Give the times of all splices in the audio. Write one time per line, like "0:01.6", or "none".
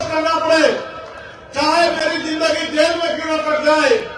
none